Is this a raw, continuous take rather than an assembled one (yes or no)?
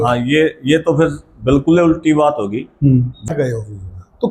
no